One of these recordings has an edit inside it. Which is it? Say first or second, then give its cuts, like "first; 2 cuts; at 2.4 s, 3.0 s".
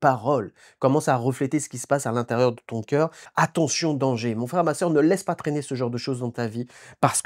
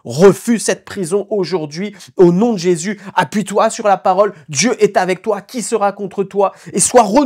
first; 1 cut; at 3.2 s